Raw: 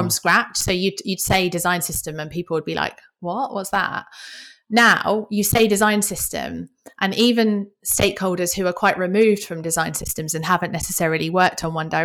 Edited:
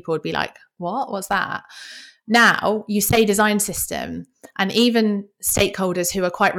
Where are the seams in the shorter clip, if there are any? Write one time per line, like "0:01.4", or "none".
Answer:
none

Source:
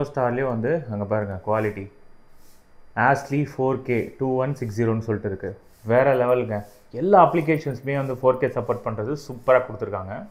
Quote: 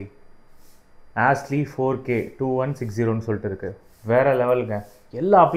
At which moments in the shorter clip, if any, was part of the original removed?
none

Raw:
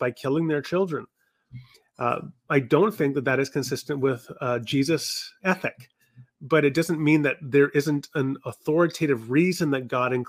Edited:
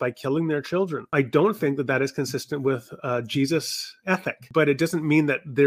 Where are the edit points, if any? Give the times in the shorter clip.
0:01.0
0:04.4

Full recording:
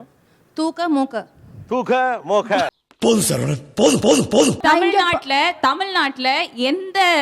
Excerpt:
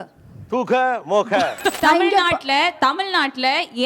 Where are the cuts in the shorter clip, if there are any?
0:01.8

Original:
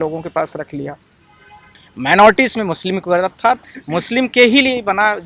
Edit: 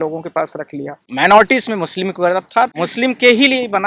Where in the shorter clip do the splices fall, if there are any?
0:01.0
0:02.7

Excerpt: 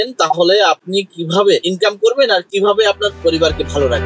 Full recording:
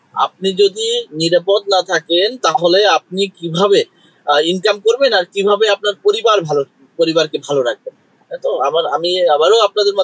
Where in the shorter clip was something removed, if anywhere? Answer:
0:01.7
0:03.1

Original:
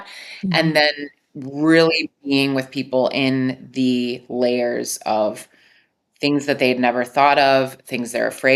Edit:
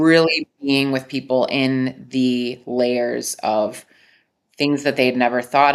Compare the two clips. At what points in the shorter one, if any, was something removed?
none

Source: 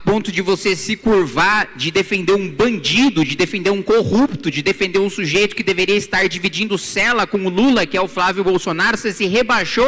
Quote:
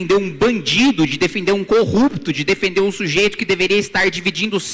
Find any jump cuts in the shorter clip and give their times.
none

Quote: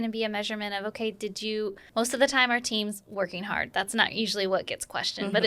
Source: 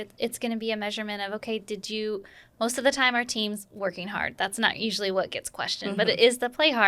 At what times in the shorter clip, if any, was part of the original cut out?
0:01.8

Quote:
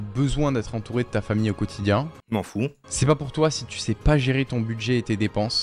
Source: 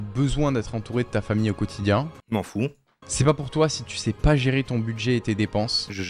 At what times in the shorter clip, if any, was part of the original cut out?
0:02.9

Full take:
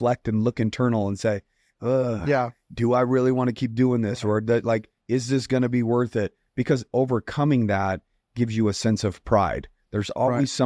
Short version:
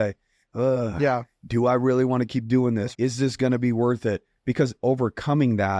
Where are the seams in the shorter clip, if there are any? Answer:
0:02.9

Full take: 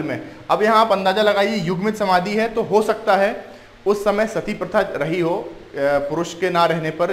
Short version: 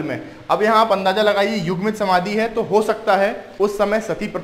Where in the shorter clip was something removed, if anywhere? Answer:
0:03.4

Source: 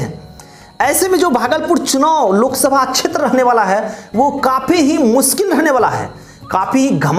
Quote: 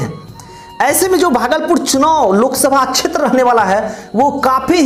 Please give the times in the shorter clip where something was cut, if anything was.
none

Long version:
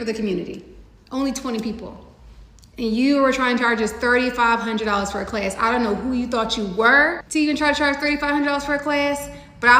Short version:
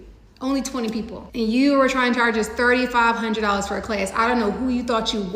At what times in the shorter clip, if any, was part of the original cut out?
0:01.2

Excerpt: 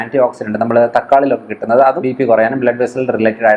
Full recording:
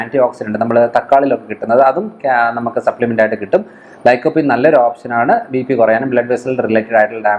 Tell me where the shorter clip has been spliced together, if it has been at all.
0:02.0

